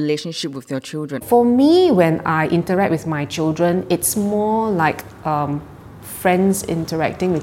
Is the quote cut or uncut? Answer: cut